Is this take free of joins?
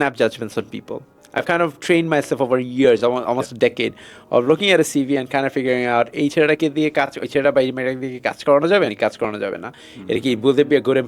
yes; 0 cuts

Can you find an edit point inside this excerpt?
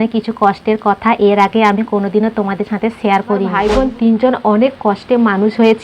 yes; 1 cut; at 3.5 s

